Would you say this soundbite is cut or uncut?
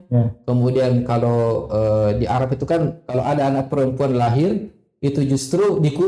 uncut